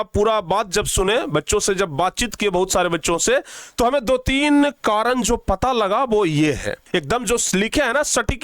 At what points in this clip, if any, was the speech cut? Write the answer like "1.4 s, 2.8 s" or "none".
6.8 s